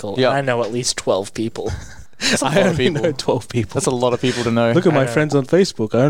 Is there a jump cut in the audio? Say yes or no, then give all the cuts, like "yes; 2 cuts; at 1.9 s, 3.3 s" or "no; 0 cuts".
no; 0 cuts